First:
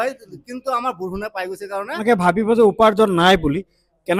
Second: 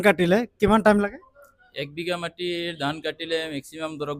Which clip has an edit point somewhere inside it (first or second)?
first